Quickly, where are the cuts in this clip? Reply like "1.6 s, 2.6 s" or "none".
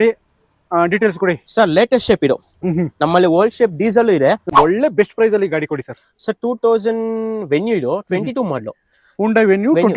4.5 s